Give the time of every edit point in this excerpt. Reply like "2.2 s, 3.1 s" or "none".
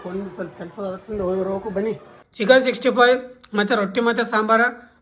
2.4 s